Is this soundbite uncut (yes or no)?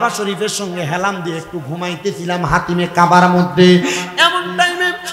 yes